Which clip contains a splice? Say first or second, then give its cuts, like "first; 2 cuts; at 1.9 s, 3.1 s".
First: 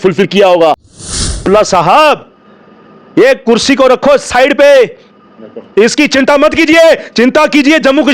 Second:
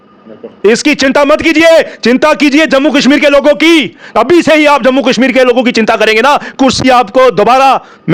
first; 1 cut; at 1.3 s